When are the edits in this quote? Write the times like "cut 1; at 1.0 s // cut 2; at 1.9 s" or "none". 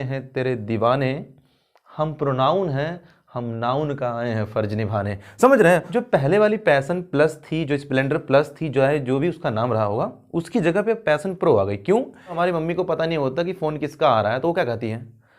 cut 1; at 5.9 s // cut 2; at 12.4 s